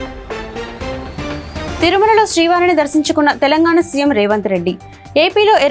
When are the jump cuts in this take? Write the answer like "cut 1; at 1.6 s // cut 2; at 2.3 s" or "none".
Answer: cut 1; at 1.7 s